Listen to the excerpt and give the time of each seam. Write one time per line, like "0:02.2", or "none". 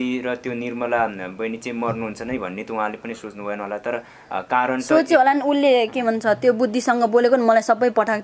none